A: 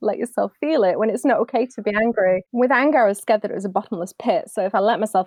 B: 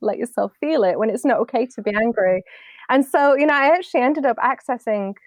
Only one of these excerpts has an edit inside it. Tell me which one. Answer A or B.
A